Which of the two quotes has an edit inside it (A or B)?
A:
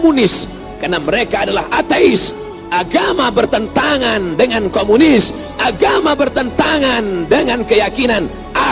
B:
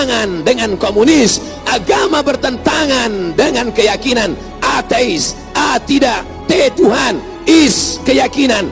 A